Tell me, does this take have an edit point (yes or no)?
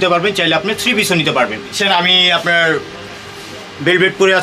yes